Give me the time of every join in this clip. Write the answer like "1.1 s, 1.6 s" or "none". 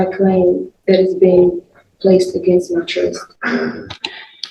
none